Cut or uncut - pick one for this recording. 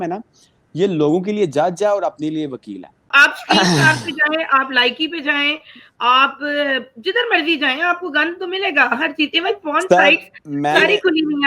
cut